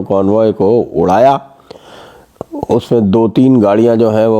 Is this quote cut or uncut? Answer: uncut